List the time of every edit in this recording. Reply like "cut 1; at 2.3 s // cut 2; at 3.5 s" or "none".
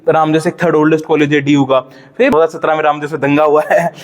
cut 1; at 2.3 s